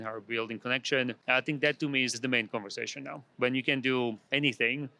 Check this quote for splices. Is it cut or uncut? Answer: cut